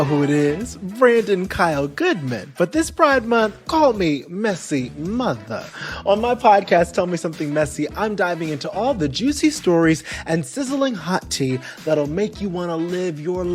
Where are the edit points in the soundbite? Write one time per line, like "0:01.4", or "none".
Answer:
none